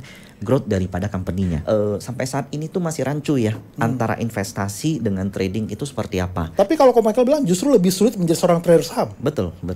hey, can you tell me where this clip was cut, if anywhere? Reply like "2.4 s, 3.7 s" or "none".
1.6 s, 6.4 s